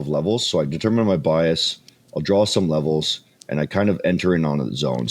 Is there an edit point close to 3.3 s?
no; 0 cuts

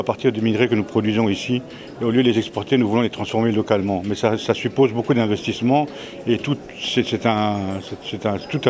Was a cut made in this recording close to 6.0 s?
no; 0 cuts

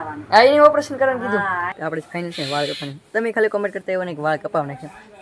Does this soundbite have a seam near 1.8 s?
yes; 1 cut; at 1.8 s

